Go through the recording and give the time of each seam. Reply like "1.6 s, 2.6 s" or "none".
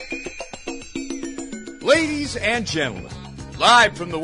1.8 s